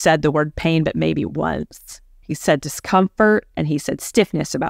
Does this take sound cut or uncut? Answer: uncut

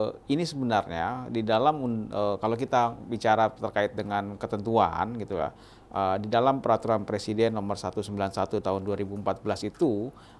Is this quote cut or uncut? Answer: uncut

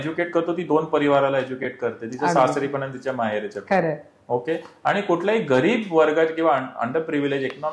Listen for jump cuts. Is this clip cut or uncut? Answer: uncut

